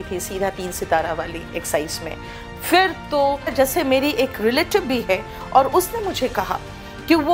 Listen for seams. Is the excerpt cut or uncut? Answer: cut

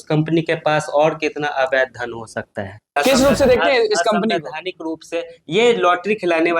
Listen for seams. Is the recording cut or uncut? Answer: cut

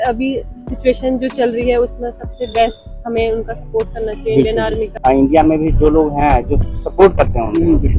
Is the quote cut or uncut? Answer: cut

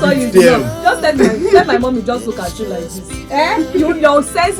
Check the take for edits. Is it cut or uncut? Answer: uncut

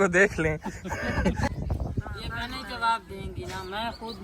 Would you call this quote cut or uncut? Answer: cut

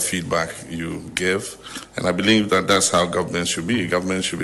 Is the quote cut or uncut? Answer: uncut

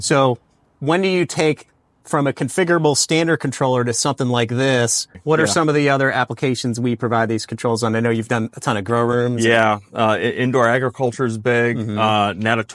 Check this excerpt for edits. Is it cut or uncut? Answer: cut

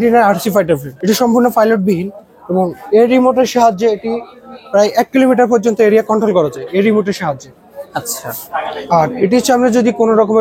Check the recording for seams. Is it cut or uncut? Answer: cut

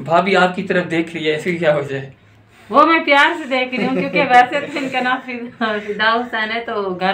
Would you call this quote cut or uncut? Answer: uncut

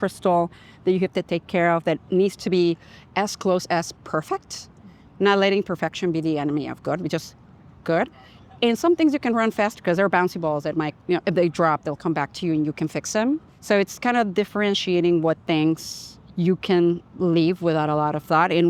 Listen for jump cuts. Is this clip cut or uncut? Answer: uncut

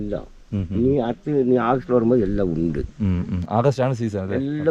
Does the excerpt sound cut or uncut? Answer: uncut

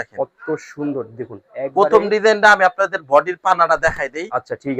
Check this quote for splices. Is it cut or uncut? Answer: uncut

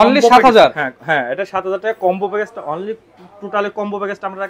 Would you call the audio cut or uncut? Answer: uncut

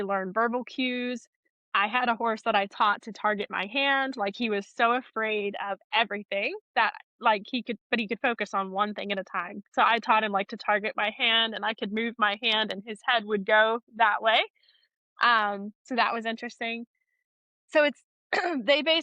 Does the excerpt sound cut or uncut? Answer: uncut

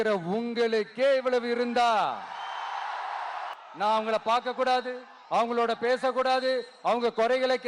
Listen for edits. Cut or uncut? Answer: cut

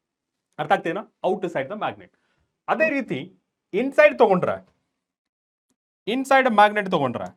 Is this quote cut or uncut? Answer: uncut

